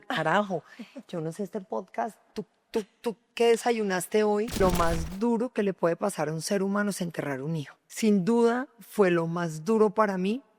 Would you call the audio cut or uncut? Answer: cut